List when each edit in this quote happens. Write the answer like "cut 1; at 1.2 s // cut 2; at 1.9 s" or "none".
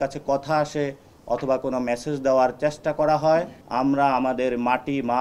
cut 1; at 3.6 s